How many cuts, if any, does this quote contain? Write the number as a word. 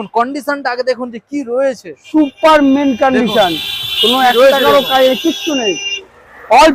zero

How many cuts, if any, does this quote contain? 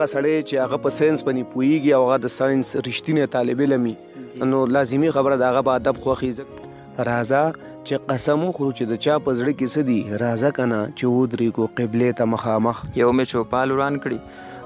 two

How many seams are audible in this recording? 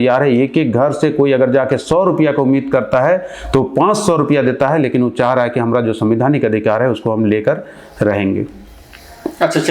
zero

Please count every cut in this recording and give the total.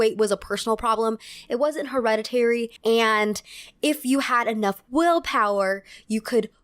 one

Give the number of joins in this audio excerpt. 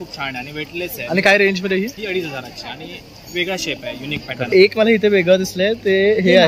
one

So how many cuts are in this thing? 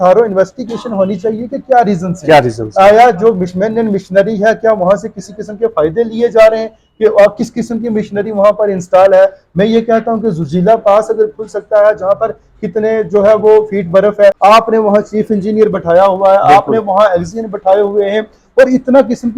one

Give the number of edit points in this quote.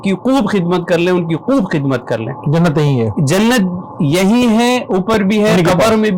zero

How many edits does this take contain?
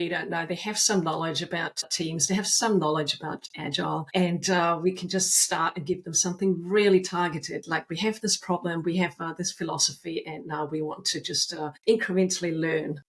three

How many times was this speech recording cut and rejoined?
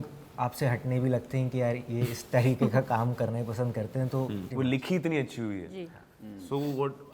one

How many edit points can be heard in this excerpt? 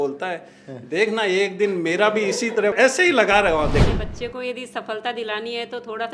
two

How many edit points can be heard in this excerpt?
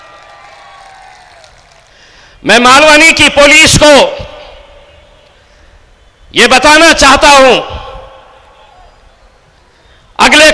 one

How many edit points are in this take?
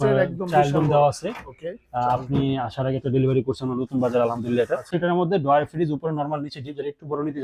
one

